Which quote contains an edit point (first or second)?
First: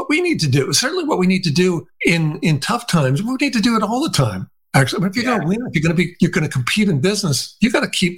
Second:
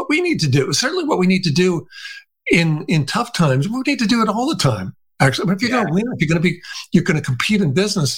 first